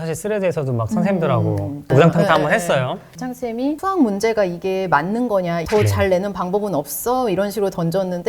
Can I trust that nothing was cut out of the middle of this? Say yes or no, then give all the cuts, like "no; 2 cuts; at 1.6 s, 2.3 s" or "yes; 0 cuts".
no; 2 cuts; at 3.1 s, 5.6 s